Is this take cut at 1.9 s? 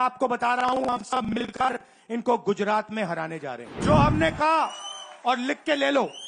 no; 1 cut; at 3.7 s

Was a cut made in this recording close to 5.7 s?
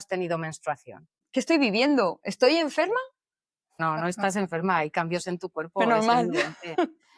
no; 2 cuts; at 1.1 s, 3.8 s

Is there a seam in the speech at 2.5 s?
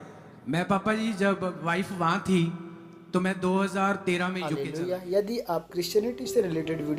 no; 1 cut; at 4.5 s

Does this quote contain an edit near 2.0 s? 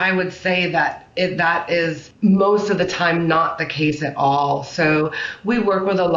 yes; 1 cut; at 2.0 s

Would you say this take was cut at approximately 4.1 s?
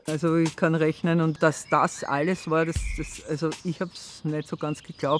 no; 1 cut; at 1.4 s

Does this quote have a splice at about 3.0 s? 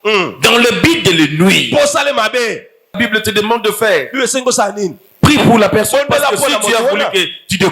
yes; 1 cut; at 3.0 s

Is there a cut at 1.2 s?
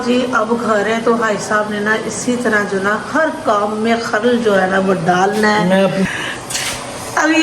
no; 1 cut; at 6.1 s

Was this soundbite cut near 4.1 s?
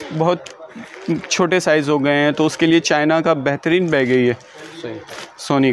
no; 0 cuts

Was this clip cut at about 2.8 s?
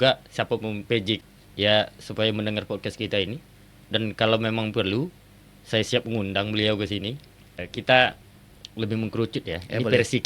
no; 2 cuts; at 1.2 s, 7.7 s

